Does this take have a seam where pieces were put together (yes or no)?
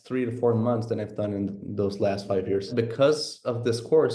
yes